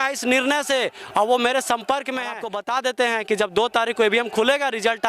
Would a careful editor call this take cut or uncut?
cut